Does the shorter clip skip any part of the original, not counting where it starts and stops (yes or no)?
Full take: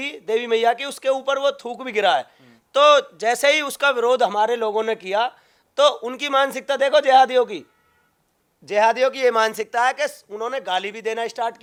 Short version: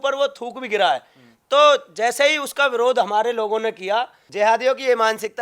yes